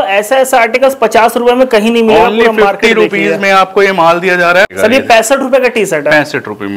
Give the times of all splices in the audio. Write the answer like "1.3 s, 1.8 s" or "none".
4.7 s